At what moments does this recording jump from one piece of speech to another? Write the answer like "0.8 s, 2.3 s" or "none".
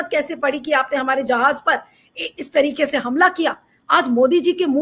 none